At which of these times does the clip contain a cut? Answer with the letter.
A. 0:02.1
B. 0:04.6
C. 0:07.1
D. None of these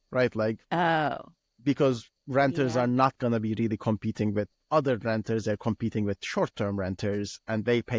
A